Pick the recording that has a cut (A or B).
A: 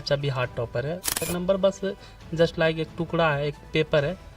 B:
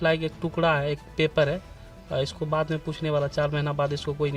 A